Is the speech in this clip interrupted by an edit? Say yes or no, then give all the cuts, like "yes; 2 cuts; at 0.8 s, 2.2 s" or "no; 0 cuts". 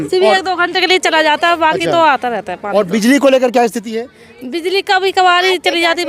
no; 0 cuts